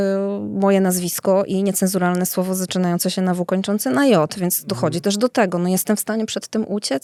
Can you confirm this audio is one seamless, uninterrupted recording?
yes; 0 cuts

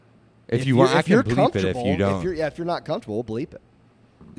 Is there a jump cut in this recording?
no; 0 cuts

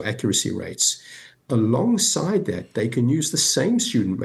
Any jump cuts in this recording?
no; 0 cuts

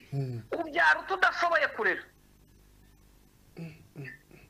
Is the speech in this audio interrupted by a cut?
no; 0 cuts

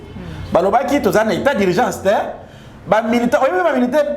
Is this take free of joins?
yes; 0 cuts

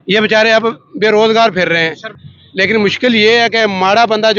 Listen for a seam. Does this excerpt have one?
yes; 1 cut; at 2.2 s

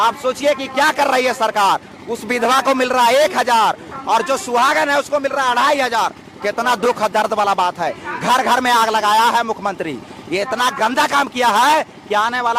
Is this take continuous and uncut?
yes; 0 cuts

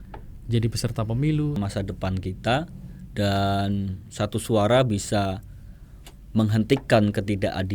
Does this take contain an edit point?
yes; 1 cut; at 1.6 s

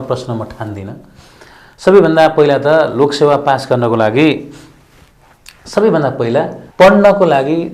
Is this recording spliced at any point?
yes; 1 cut; at 6.6 s

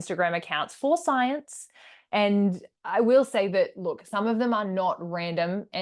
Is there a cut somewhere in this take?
no; 0 cuts

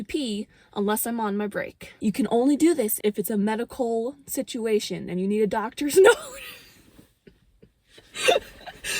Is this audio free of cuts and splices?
no; 2 cuts; at 1.9 s, 2.9 s

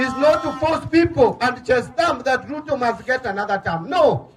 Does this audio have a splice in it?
no; 0 cuts

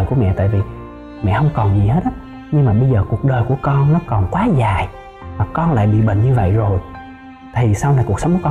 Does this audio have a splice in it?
no; 0 cuts

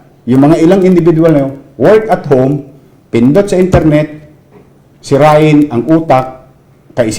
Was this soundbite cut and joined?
no; 0 cuts

